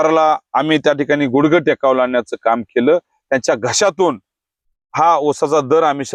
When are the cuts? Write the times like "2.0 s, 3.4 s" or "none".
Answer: none